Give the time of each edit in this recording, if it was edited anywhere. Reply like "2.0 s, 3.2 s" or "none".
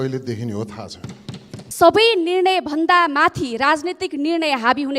1.6 s